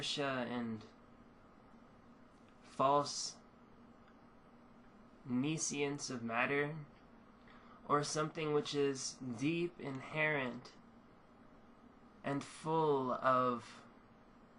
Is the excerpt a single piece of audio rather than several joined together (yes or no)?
no